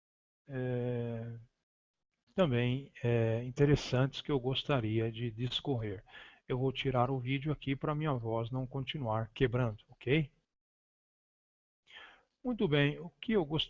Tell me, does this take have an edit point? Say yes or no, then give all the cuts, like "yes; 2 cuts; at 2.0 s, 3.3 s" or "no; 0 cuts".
no; 0 cuts